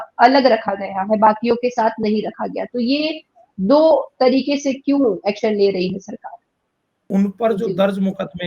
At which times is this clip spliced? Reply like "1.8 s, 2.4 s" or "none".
7.0 s